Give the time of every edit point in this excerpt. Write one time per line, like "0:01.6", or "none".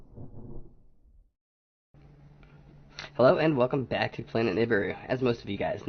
0:01.3